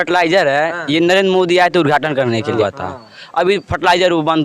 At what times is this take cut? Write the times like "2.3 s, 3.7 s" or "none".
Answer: 2.6 s